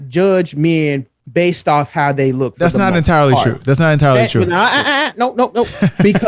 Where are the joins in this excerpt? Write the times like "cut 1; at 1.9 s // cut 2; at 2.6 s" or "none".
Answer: none